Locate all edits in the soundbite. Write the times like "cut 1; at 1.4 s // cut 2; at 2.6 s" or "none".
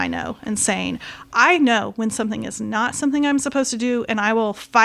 none